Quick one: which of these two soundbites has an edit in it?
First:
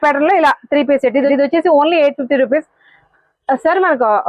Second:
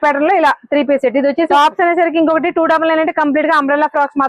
second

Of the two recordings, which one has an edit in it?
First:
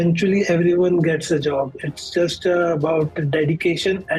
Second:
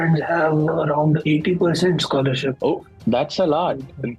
second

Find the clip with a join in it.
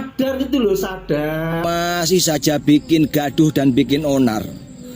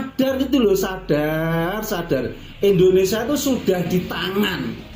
first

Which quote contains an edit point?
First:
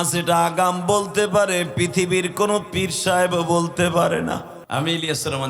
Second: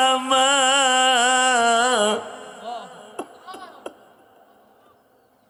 first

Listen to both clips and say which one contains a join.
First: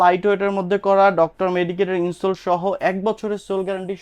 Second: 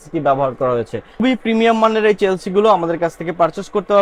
second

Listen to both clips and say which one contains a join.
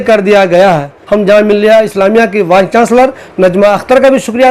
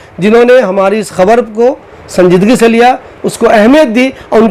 first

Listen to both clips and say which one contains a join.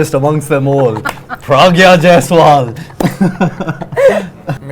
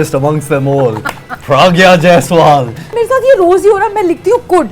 second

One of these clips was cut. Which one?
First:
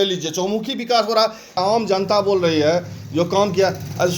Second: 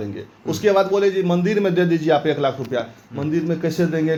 first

